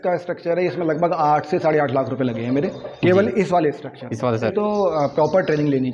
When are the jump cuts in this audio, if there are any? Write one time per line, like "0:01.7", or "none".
0:04.5